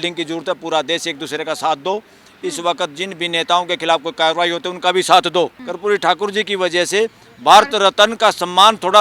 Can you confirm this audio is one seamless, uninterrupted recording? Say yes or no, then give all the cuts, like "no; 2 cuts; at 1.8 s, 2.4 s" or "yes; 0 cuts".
no; 1 cut; at 5.6 s